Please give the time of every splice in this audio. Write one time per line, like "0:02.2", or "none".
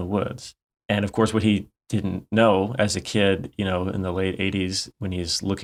none